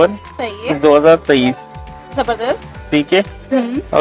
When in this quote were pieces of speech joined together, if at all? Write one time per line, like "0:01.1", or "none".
none